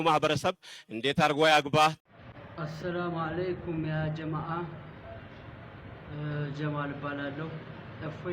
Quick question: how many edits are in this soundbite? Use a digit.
1